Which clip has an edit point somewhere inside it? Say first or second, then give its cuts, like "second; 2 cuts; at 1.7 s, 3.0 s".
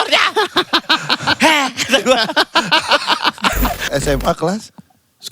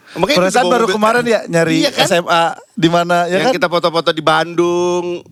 first; 1 cut; at 3.9 s